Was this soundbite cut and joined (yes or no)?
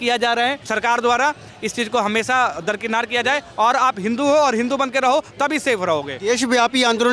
no